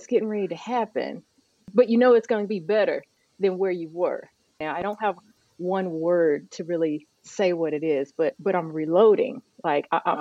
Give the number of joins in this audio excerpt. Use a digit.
2